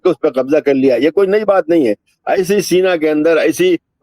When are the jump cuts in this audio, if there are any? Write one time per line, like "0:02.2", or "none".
none